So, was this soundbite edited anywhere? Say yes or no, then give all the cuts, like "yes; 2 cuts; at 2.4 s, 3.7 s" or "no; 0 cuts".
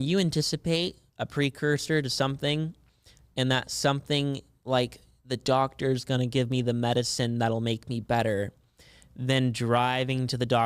no; 0 cuts